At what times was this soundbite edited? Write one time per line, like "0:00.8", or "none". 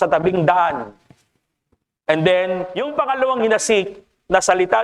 0:02.8